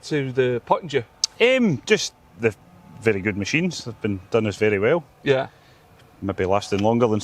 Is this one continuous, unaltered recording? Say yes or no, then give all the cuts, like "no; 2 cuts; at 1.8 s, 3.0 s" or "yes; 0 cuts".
yes; 0 cuts